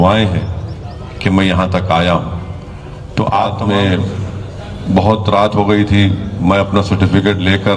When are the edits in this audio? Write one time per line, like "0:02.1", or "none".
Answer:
0:03.5